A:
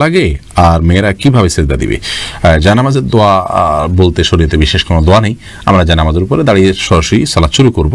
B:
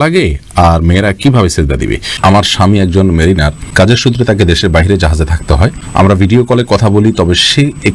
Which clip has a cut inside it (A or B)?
B